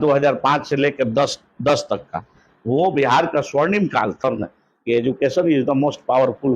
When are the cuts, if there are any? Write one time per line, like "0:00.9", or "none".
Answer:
0:04.2